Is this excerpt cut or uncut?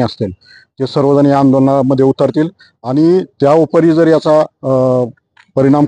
uncut